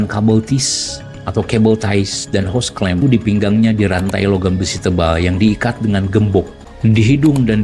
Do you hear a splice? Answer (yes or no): yes